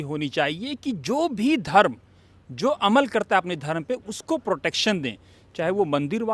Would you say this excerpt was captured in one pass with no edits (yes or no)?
yes